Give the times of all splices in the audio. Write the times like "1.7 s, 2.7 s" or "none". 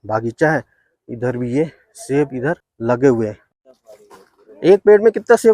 2.7 s, 3.5 s